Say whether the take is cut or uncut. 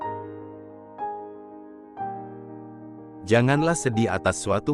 cut